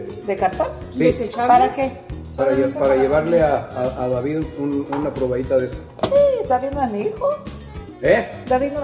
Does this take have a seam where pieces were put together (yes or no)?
no